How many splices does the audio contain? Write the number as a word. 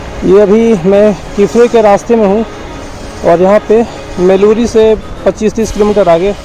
zero